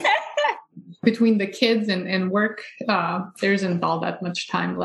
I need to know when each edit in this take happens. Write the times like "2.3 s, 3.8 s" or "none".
1.0 s